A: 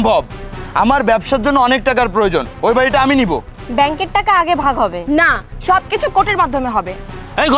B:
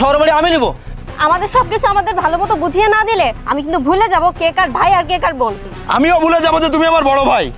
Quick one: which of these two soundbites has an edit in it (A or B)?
B